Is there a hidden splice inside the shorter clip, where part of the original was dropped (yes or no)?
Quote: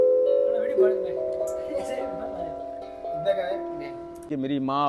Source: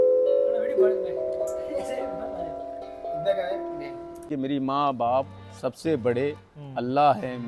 no